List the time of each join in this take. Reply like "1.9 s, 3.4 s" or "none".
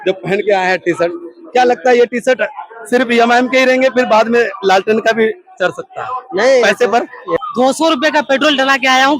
7.4 s